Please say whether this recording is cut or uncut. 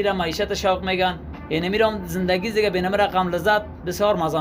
uncut